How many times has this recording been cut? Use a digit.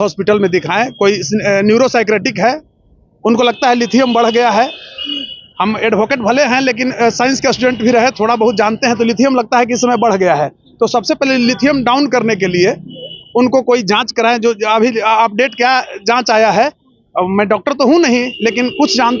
0